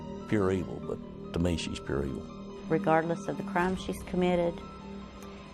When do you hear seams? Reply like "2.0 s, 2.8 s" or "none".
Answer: 3.2 s